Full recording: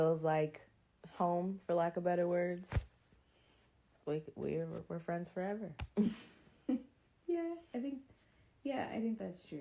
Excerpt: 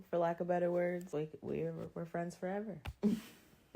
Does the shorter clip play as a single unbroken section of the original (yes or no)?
no